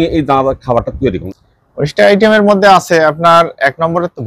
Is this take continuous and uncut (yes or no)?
no